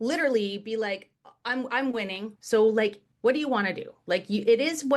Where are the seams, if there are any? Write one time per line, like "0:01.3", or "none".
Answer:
0:02.3
0:03.0